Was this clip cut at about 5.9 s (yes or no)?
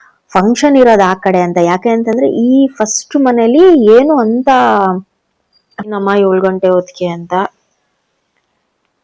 yes